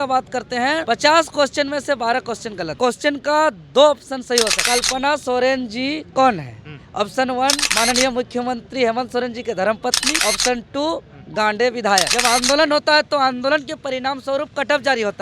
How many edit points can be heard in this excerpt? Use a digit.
3